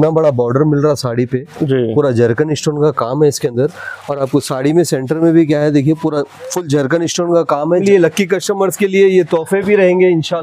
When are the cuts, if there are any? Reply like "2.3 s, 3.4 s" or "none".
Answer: 7.8 s